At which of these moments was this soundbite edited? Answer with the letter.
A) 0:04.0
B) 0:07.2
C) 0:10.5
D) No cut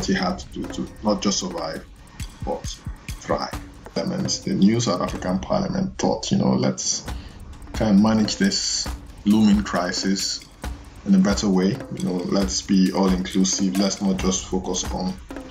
A